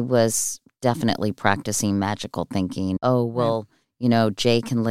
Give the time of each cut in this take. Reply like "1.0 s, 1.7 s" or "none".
3.0 s